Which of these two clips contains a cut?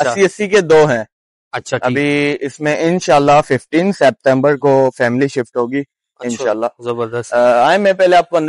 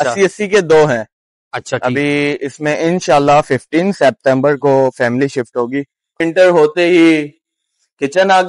second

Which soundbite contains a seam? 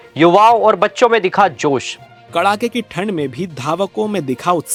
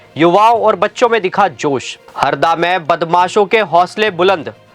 second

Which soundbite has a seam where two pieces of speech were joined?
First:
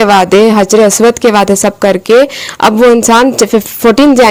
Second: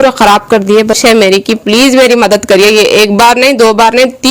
second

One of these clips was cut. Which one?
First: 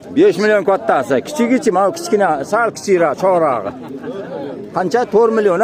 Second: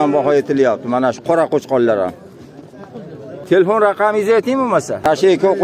second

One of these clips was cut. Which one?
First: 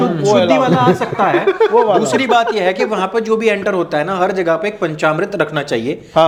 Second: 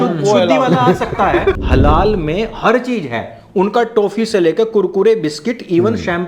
second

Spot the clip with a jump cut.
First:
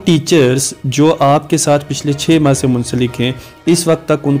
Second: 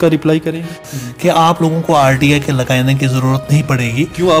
second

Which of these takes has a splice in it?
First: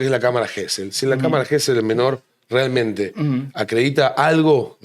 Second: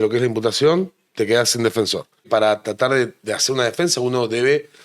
second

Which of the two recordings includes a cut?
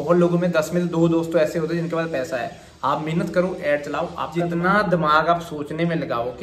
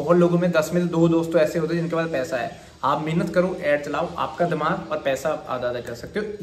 first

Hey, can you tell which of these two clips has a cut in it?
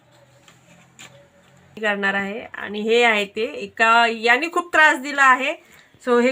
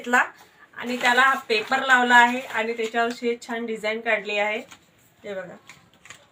first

